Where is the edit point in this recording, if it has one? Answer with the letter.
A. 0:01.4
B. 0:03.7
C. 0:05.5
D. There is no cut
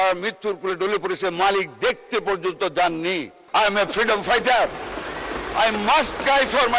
B